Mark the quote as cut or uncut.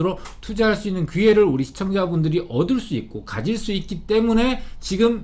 uncut